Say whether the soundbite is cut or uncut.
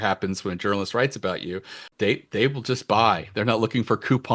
cut